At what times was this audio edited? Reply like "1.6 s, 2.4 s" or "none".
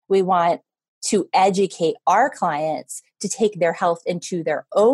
none